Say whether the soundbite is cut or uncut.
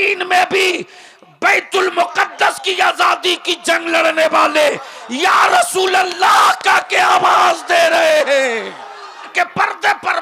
cut